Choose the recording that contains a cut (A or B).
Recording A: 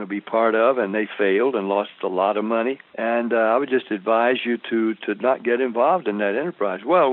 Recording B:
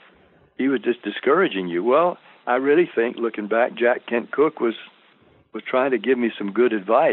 A